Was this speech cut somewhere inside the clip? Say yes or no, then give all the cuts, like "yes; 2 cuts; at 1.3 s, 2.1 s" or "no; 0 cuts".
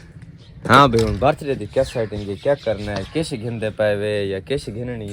no; 0 cuts